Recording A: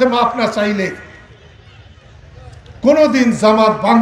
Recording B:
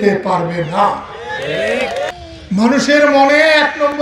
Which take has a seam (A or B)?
B